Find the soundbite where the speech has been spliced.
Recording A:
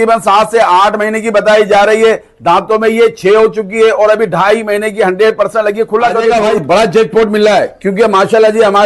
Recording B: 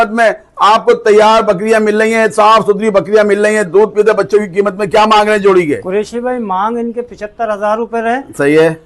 A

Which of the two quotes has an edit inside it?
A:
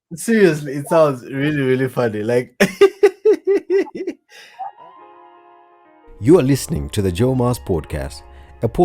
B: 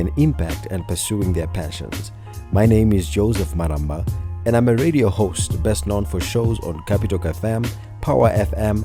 A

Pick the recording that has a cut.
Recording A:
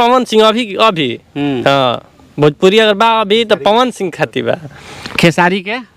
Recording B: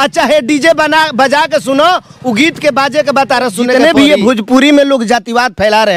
B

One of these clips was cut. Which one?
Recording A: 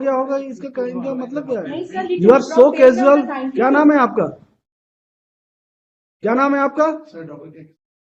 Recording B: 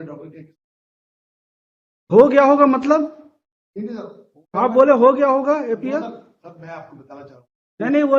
A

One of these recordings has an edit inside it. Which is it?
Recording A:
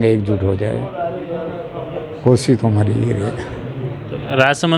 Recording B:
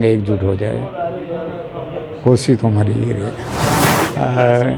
B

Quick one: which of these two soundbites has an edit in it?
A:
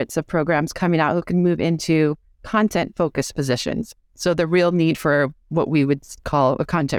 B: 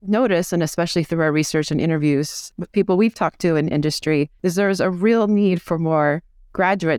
B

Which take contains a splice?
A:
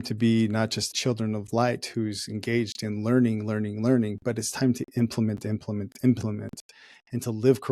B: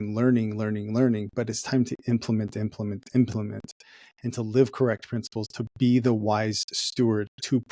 A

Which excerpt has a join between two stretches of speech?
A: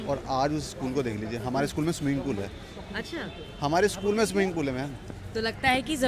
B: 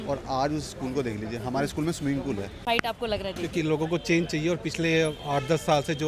B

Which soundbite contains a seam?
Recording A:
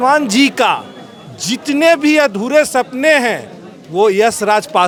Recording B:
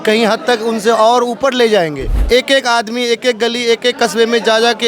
B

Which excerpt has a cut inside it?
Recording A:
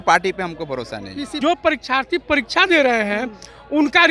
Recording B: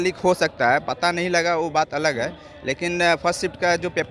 A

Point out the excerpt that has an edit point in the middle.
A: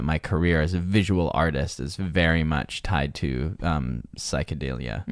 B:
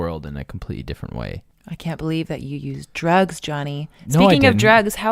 B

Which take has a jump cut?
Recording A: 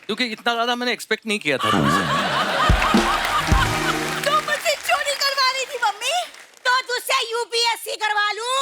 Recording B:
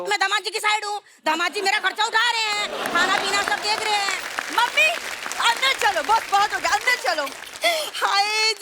A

